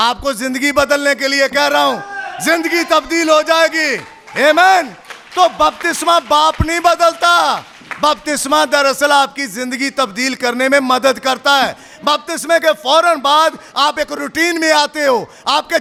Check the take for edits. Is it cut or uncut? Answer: uncut